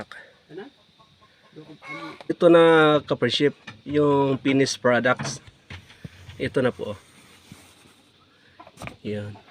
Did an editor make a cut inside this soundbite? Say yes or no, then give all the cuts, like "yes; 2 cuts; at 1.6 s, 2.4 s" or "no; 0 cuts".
yes; 1 cut; at 2.3 s